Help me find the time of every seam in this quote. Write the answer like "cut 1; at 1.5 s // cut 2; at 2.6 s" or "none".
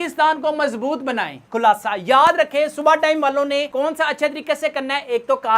cut 1; at 1.3 s